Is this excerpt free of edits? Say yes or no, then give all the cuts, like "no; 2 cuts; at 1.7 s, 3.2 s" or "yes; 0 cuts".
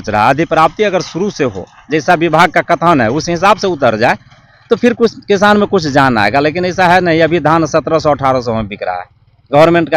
yes; 0 cuts